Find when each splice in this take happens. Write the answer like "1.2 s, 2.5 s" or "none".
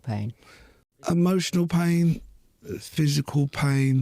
1.0 s